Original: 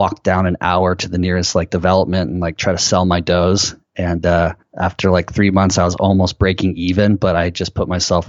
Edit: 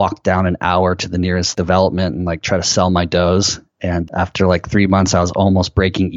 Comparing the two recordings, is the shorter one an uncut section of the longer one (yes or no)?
no